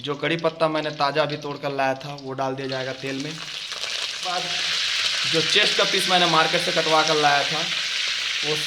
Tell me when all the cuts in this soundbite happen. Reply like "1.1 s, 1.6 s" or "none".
4.2 s